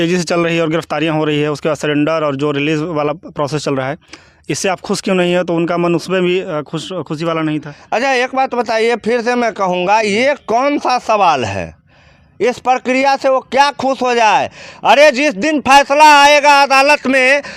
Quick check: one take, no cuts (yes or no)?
yes